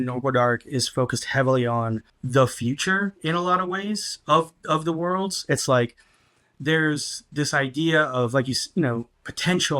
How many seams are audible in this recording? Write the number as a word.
one